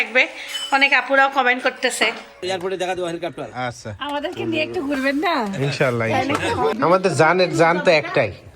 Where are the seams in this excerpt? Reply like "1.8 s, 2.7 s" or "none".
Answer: 2.4 s, 6.7 s